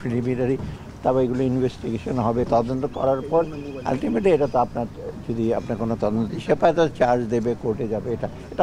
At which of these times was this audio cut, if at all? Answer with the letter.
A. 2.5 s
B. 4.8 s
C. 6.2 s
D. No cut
A